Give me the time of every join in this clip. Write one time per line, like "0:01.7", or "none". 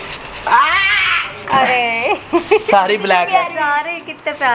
none